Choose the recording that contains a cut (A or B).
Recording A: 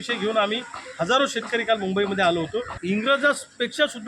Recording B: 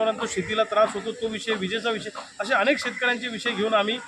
A